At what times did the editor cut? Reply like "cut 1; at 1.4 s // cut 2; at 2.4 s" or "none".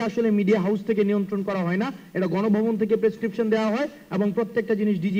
none